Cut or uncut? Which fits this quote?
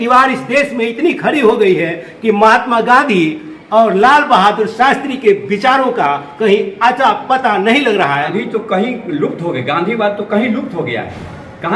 cut